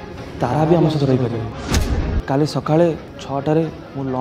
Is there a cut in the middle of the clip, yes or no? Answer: yes